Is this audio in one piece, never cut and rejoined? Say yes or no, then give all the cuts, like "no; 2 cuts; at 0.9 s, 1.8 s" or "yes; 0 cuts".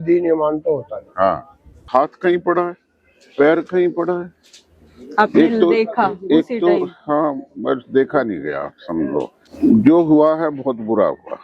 no; 2 cuts; at 1.8 s, 9.5 s